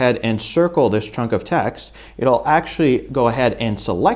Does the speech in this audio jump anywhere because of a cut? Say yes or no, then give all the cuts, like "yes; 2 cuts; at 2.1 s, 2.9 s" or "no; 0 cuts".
no; 0 cuts